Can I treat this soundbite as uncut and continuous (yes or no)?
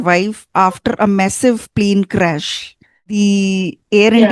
no